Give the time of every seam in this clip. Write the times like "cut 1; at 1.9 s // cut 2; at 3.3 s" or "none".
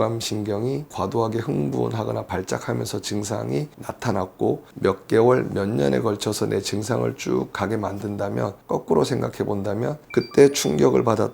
cut 1; at 0.9 s // cut 2; at 3.8 s // cut 3; at 8.6 s

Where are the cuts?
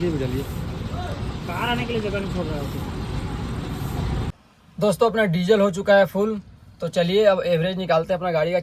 cut 1; at 4.3 s

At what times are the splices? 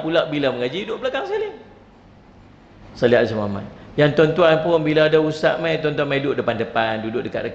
cut 1; at 2.8 s

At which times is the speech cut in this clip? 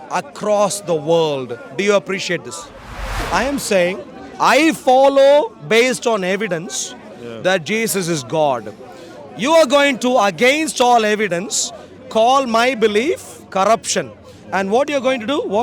cut 1; at 3.2 s

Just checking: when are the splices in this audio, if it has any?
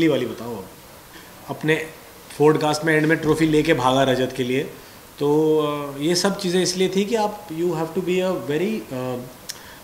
cut 1; at 1.2 s

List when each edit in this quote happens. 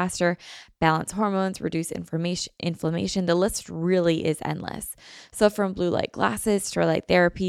none

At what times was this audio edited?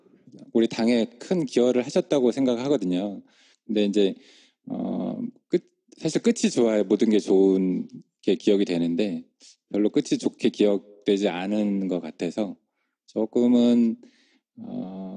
cut 1; at 12.9 s

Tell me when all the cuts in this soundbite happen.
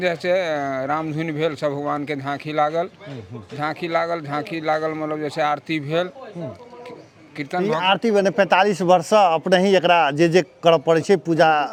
none

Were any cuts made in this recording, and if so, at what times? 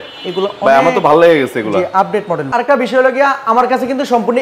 cut 1; at 2.5 s

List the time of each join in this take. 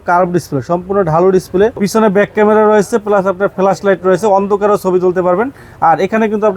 cut 1; at 1.8 s

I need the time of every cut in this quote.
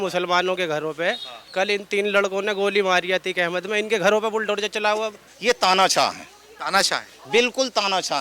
cut 1; at 5.3 s

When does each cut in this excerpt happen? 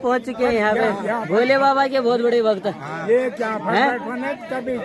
none

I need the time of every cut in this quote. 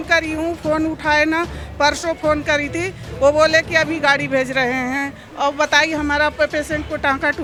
none

